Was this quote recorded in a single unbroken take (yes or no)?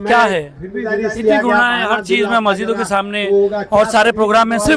no